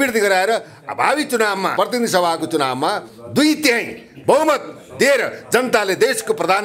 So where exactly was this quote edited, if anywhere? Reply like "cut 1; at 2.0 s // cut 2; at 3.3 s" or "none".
cut 1; at 1.7 s